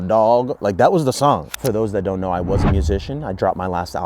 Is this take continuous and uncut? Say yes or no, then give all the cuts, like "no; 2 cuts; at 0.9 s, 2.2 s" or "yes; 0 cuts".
no; 1 cut; at 1.5 s